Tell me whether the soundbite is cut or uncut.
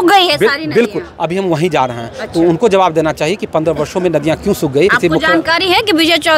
cut